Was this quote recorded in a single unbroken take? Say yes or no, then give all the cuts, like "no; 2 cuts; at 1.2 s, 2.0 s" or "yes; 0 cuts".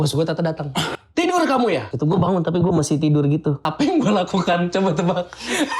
no; 3 cuts; at 0.9 s, 1.9 s, 3.6 s